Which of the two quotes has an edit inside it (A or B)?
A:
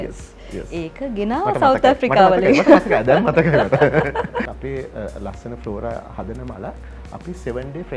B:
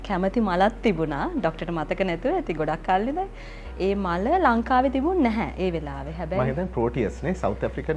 A